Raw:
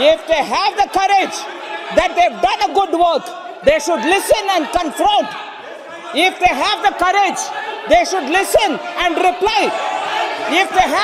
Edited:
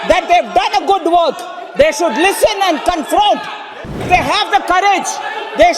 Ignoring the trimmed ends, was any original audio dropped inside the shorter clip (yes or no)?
yes